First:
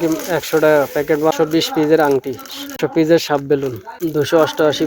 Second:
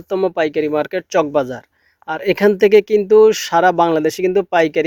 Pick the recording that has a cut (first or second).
first